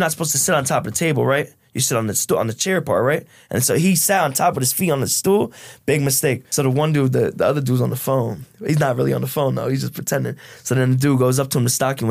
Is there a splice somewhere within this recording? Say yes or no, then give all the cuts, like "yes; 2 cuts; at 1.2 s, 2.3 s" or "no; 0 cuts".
yes; 1 cut; at 6.4 s